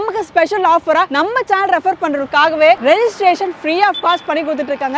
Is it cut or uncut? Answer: uncut